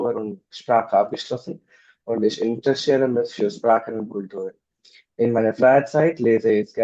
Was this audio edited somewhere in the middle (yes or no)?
no